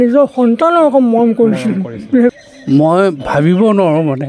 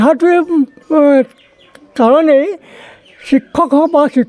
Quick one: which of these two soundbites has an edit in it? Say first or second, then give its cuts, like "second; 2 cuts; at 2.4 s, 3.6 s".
first; 1 cut; at 2.3 s